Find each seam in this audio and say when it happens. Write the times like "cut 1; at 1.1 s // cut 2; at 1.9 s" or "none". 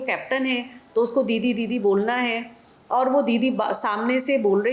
none